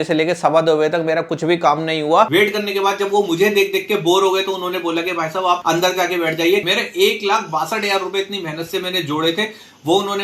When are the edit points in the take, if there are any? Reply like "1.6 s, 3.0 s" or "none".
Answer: 2.3 s, 6.6 s

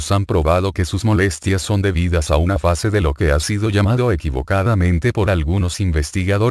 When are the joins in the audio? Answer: 5.6 s

